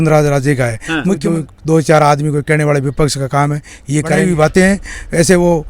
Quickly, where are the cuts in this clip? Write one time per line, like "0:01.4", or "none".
0:01.2
0:04.1